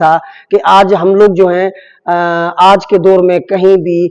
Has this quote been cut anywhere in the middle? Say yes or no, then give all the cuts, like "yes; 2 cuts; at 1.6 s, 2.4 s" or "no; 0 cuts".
no; 0 cuts